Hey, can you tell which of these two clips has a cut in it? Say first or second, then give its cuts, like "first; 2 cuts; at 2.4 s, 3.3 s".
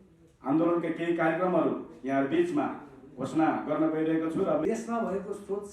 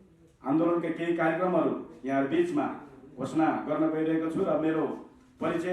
first; 1 cut; at 4.6 s